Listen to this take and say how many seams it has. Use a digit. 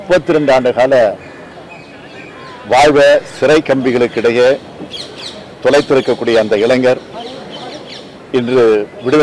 0